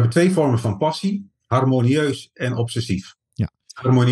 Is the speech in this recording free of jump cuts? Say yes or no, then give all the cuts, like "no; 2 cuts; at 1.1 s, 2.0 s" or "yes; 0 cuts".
yes; 0 cuts